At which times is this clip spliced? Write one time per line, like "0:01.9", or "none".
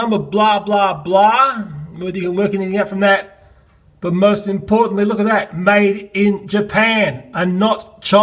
none